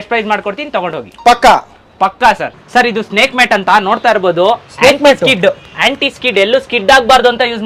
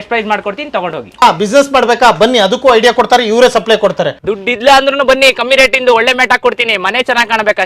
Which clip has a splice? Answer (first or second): second